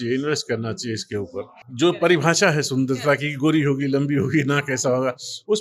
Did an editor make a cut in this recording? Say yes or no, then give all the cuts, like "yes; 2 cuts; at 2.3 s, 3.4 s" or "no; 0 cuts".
yes; 1 cut; at 1.6 s